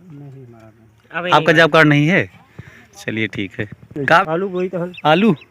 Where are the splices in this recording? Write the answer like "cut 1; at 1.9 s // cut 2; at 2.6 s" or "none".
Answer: cut 1; at 4.2 s